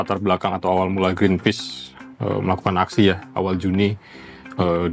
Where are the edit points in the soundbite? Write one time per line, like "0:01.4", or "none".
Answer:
none